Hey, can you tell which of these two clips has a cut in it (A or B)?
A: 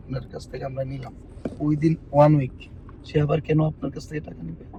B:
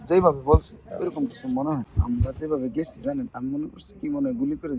B